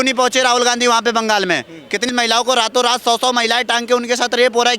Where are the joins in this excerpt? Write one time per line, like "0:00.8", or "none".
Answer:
0:02.1

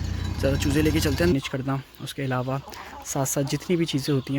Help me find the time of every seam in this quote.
0:01.3

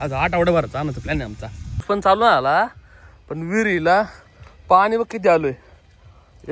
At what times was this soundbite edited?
0:01.8

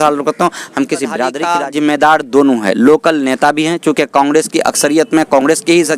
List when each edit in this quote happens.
0:01.4

